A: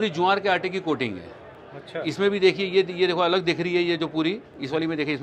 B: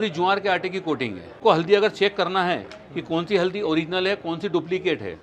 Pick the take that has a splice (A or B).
B